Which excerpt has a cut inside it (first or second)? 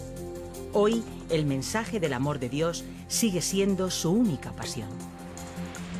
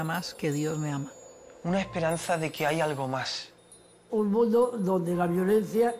second